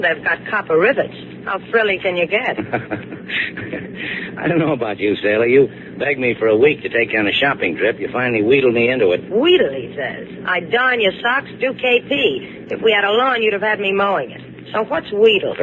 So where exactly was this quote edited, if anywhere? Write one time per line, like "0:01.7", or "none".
0:11.5